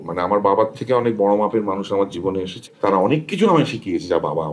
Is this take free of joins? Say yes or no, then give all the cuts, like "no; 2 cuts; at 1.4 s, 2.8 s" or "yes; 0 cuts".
no; 1 cut; at 2.6 s